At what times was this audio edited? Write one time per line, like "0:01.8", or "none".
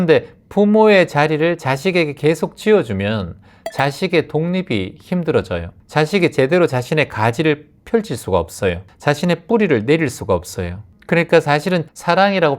none